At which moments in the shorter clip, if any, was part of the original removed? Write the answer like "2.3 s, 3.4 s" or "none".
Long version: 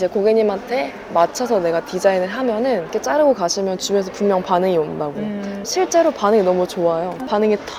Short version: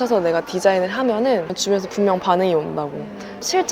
1.5 s

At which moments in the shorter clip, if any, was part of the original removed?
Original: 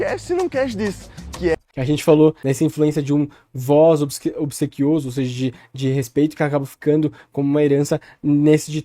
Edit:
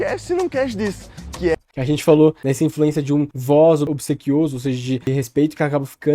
3.3 s, 3.9 s, 5.0 s

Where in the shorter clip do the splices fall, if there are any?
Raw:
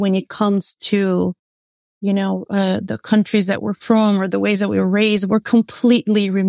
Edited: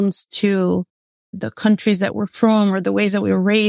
1.4 s

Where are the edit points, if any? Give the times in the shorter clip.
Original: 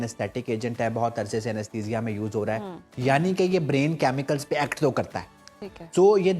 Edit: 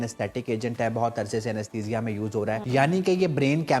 2.6 s

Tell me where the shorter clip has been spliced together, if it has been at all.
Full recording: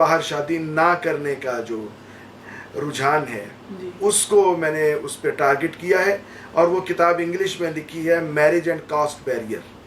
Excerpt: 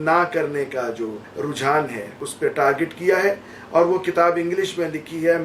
1.2 s, 2.3 s

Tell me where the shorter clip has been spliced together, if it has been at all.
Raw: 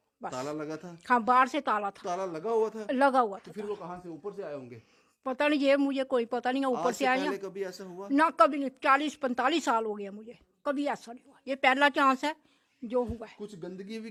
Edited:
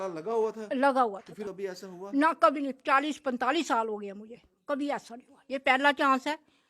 1.5 s

